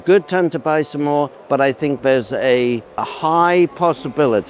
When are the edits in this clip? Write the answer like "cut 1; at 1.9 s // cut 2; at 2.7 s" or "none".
cut 1; at 1.4 s // cut 2; at 3.1 s